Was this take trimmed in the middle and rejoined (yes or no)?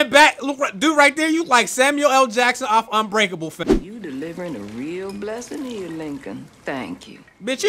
yes